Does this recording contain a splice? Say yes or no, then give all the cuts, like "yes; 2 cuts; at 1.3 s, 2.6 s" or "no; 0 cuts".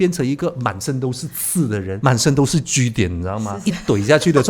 yes; 2 cuts; at 1.9 s, 3.5 s